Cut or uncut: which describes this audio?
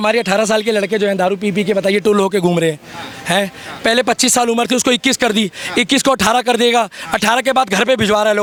uncut